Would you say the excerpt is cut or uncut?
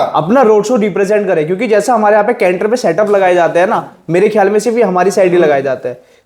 uncut